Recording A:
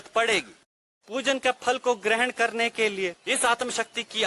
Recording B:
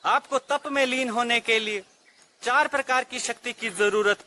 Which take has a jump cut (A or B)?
A